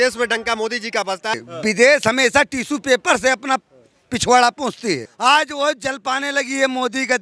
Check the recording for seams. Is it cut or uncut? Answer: cut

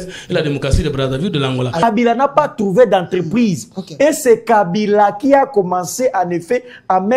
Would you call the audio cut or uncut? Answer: cut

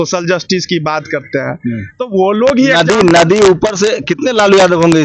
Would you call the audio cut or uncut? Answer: uncut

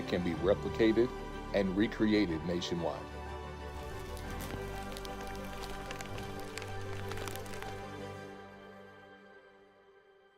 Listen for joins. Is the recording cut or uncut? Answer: uncut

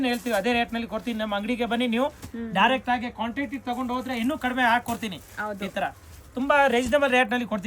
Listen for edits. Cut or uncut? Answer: uncut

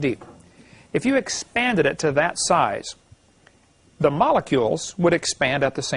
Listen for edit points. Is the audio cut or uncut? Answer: uncut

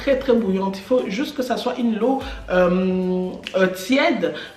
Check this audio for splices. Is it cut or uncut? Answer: uncut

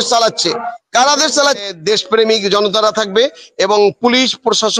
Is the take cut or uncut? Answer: cut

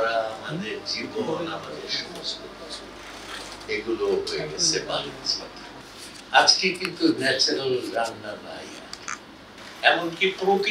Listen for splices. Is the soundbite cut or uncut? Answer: cut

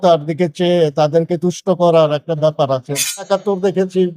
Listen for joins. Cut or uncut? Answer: cut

